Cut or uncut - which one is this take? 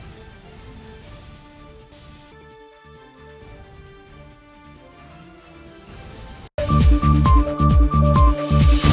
cut